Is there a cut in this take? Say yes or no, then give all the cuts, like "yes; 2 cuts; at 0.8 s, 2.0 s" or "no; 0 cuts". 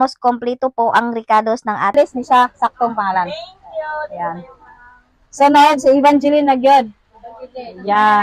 yes; 1 cut; at 1.9 s